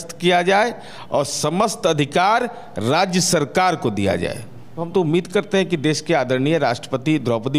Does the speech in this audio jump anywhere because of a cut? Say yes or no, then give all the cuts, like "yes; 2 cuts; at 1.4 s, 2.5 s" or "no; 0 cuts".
no; 0 cuts